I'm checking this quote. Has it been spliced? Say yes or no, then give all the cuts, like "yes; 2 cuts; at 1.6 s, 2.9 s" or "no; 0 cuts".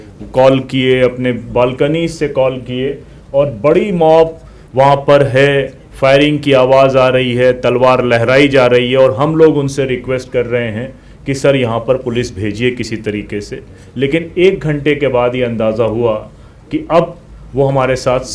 no; 0 cuts